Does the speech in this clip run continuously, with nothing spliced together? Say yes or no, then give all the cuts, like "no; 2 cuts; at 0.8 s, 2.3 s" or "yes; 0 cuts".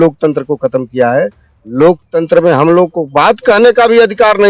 yes; 0 cuts